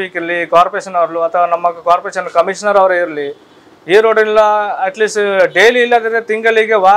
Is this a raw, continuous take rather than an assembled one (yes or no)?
yes